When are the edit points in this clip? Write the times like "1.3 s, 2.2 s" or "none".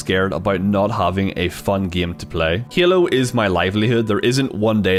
none